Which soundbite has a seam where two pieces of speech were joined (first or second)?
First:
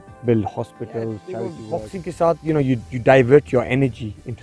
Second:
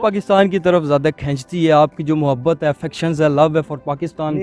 first